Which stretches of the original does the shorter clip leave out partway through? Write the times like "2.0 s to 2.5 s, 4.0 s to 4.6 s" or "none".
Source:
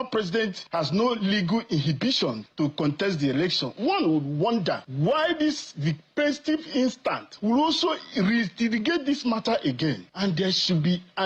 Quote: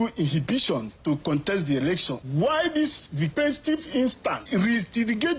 3.7 s to 4.8 s, 6.0 s to 6.1 s, 7.2 s to 8.1 s